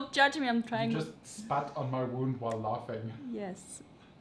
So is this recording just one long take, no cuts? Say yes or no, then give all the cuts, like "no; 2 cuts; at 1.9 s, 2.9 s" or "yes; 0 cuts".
yes; 0 cuts